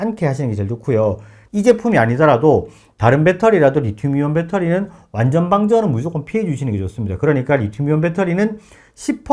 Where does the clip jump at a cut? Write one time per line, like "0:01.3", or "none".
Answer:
0:01.3